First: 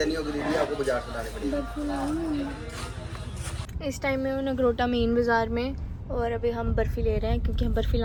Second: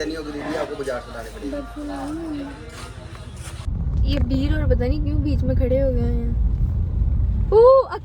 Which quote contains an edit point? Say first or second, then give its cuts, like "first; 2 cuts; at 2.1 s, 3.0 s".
second; 1 cut; at 3.7 s